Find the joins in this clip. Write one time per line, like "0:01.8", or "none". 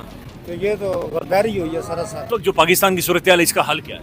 none